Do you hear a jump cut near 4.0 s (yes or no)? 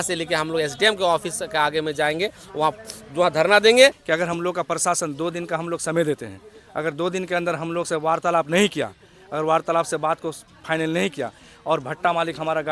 yes